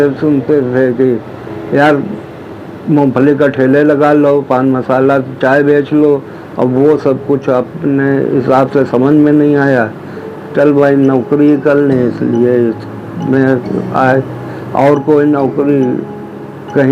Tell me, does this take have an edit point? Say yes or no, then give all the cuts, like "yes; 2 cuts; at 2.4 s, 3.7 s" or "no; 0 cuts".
no; 0 cuts